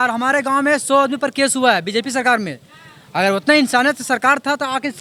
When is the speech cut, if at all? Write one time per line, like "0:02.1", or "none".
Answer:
none

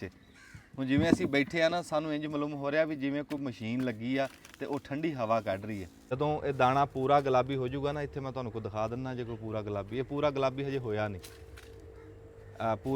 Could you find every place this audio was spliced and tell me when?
0:06.0

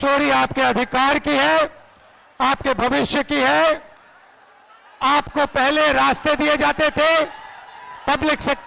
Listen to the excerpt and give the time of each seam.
none

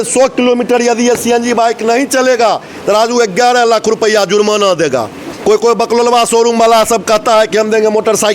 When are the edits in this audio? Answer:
0:05.3

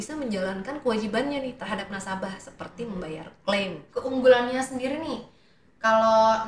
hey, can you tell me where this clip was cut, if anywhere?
0:03.8

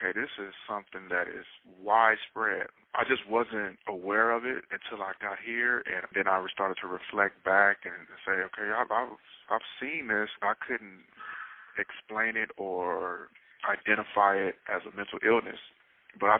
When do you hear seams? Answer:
none

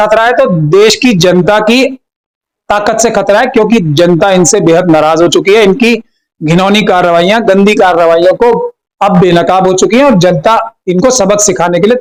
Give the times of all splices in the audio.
none

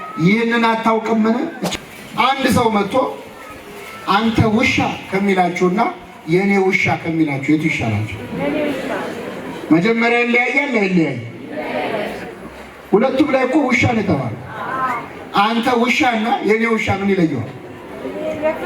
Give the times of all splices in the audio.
0:01.6

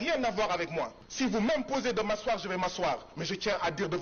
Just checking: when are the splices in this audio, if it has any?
0:01.0

